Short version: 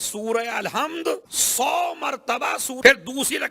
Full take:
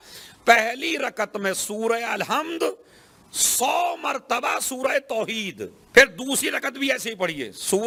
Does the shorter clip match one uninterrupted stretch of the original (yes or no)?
no